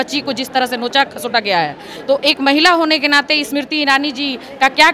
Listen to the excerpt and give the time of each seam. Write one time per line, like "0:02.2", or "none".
none